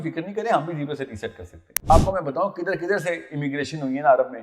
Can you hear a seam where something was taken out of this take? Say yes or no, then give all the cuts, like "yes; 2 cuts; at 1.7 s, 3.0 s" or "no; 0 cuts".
yes; 1 cut; at 1.9 s